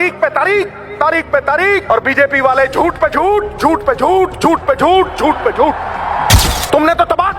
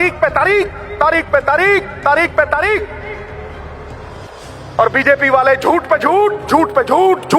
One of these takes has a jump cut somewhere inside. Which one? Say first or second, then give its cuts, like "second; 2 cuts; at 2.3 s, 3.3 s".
first; 2 cuts; at 1.8 s, 6.4 s